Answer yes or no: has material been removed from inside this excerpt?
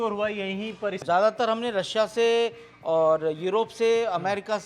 yes